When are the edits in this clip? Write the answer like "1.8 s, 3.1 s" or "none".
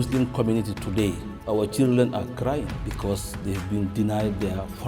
1.3 s, 2.8 s